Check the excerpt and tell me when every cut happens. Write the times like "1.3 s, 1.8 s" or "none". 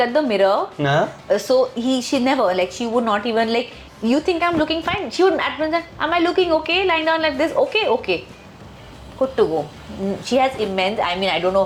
none